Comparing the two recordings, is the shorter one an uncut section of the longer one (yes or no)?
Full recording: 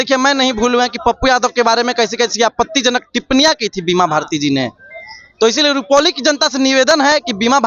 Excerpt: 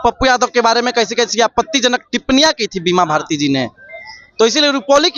yes